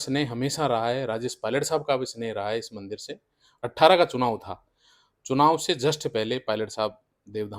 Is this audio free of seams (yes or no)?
no